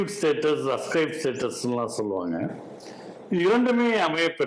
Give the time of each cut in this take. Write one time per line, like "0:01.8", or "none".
none